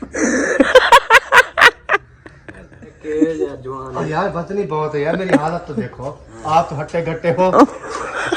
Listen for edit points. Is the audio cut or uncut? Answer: cut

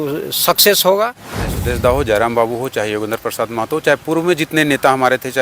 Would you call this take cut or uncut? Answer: cut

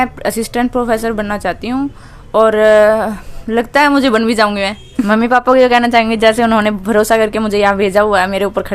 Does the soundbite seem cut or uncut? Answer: cut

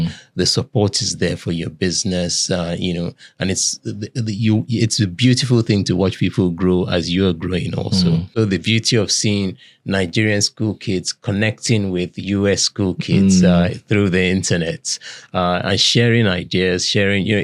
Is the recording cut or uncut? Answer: cut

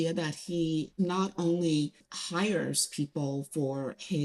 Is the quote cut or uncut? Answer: cut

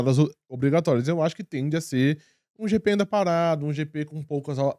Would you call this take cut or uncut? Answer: uncut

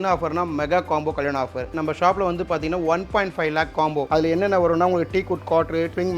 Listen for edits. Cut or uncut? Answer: cut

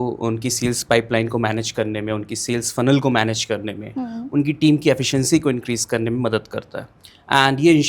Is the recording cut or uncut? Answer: uncut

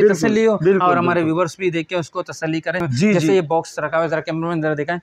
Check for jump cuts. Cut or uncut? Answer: uncut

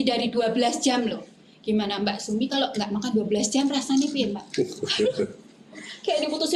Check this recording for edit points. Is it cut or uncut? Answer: uncut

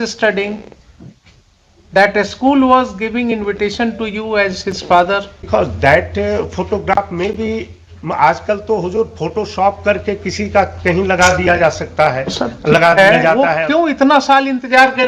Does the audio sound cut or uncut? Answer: cut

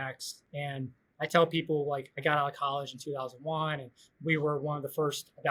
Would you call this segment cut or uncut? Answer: uncut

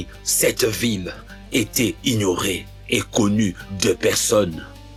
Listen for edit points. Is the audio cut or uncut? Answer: uncut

